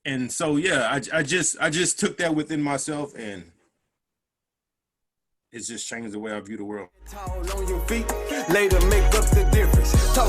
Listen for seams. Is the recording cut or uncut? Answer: cut